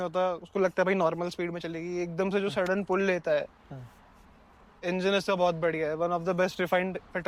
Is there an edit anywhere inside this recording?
no; 0 cuts

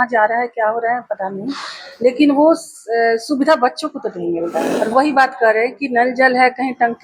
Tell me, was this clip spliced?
yes; 1 cut; at 4.7 s

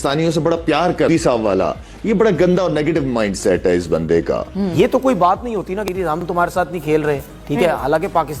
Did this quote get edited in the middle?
yes; 2 cuts; at 1.1 s, 4.7 s

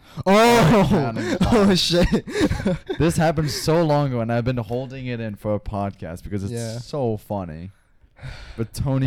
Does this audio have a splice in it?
no; 0 cuts

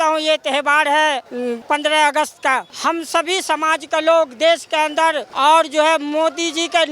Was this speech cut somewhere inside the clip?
yes; 3 cuts; at 1.5 s, 2.7 s, 5.3 s

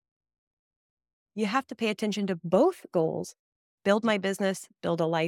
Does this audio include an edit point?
no; 0 cuts

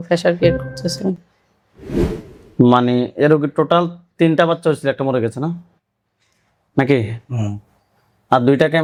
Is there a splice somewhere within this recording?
no; 0 cuts

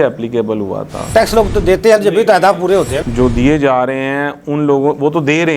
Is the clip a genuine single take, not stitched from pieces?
no; 2 cuts; at 1.1 s, 3.0 s

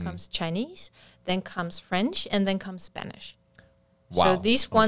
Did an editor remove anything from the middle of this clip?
no; 0 cuts

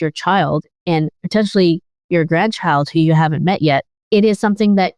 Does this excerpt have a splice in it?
yes; 1 cut; at 3.9 s

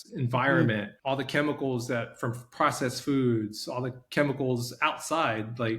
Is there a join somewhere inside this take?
yes; 1 cut; at 0.9 s

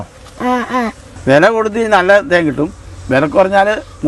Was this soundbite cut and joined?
yes; 1 cut; at 1.1 s

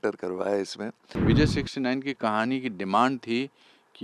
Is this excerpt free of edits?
no; 1 cut; at 1.1 s

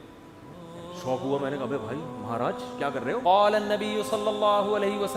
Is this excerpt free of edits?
no; 1 cut; at 3.2 s

